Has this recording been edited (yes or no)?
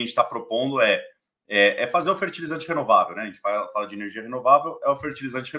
no